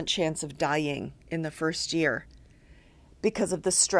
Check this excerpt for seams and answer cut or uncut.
uncut